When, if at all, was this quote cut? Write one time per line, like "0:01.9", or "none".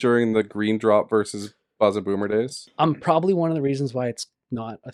none